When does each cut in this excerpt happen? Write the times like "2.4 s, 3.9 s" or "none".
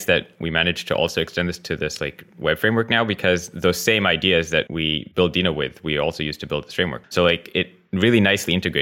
4.9 s, 7.0 s